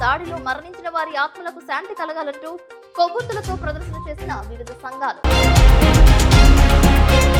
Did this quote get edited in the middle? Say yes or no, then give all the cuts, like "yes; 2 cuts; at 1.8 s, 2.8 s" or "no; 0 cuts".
no; 0 cuts